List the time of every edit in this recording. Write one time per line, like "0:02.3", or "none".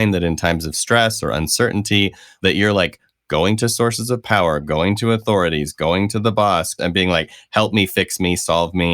0:02.3
0:06.7